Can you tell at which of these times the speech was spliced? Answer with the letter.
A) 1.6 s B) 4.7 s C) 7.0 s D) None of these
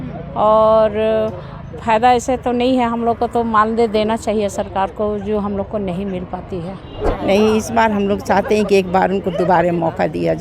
C